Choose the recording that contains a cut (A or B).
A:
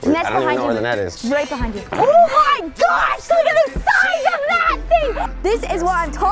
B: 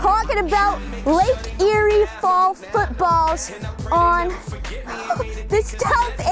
A